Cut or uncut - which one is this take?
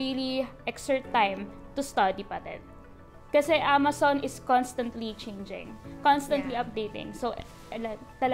uncut